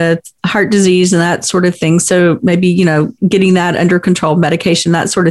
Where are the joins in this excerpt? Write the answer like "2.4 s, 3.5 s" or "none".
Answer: 3.1 s